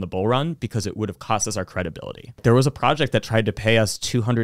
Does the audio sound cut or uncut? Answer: cut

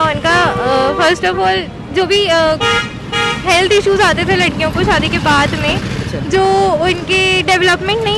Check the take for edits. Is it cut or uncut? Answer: uncut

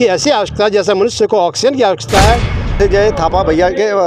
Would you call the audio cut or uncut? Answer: cut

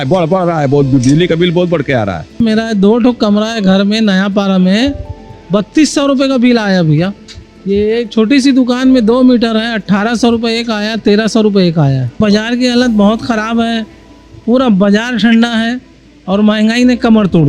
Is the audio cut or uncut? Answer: cut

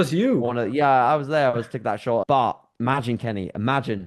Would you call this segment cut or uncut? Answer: cut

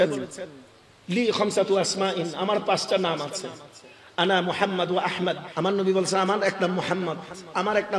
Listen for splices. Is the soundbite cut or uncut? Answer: cut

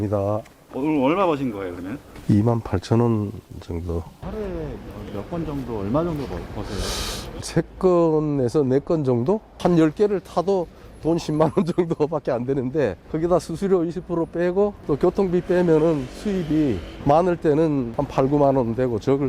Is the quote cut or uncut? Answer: cut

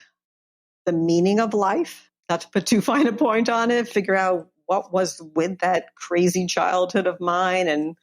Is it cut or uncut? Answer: cut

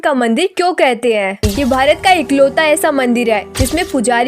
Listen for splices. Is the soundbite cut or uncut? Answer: cut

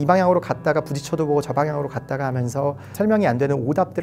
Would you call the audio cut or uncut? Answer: cut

